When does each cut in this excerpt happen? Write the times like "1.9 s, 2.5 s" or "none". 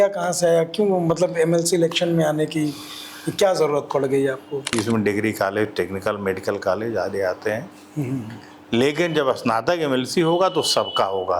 4.7 s